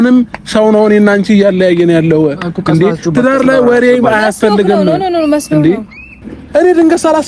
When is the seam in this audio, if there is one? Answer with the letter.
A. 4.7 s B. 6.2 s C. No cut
B